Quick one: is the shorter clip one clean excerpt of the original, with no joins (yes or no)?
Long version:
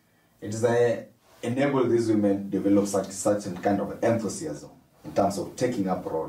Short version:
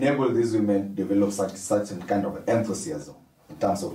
yes